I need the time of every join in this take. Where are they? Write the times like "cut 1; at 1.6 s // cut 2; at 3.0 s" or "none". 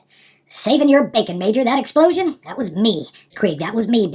cut 1; at 3.2 s